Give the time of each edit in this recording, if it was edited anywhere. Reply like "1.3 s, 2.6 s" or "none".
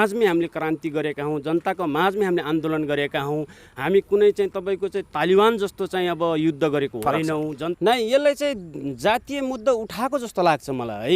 7.7 s